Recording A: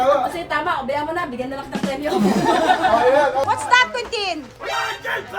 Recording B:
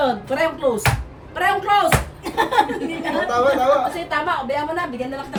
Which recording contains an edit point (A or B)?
A